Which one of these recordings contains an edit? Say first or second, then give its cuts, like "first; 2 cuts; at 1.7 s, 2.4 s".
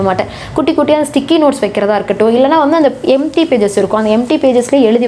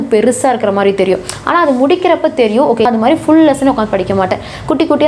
second; 1 cut; at 2.8 s